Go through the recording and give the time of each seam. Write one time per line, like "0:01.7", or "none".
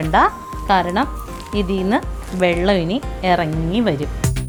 none